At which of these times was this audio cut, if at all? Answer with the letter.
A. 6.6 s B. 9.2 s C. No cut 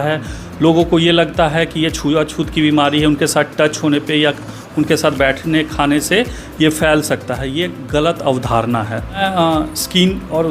B